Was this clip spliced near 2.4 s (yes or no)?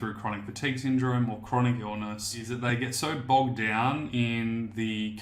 yes